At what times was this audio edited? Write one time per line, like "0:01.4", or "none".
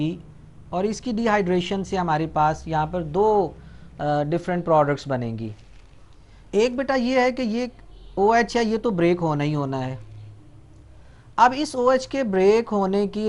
none